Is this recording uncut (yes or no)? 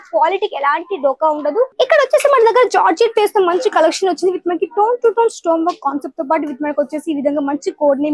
no